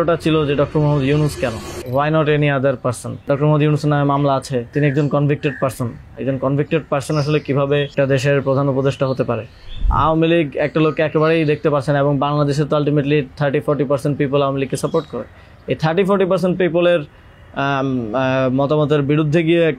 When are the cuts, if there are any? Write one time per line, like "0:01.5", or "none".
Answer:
0:01.7
0:03.2
0:04.7
0:07.9
0:09.9